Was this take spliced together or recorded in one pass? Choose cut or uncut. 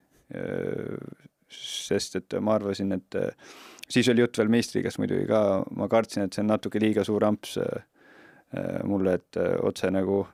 uncut